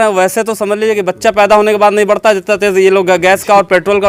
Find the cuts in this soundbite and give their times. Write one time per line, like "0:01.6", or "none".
none